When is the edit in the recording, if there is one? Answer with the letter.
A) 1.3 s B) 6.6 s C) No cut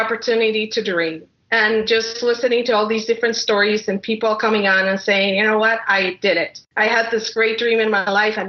B